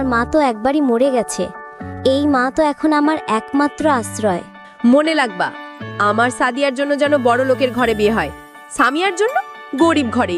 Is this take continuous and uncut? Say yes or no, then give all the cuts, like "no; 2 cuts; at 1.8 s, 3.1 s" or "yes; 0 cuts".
no; 1 cut; at 4.5 s